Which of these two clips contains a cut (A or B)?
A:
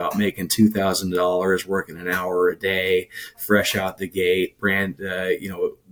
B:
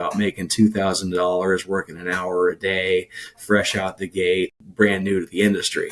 B